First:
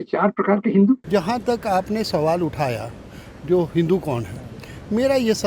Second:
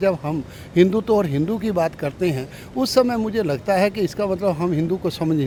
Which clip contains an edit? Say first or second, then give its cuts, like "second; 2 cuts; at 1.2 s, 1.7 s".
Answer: first; 1 cut; at 1.0 s